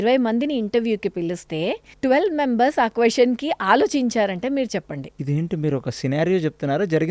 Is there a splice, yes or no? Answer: yes